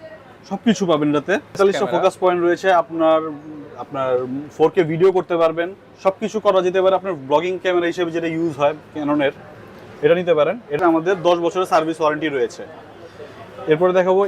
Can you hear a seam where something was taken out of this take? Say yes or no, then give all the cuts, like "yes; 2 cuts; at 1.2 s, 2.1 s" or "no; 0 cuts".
yes; 2 cuts; at 1.6 s, 10.8 s